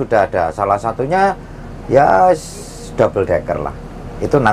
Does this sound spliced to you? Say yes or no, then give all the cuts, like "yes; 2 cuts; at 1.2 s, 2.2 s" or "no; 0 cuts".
no; 0 cuts